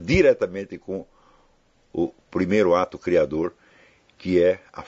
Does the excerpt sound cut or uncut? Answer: uncut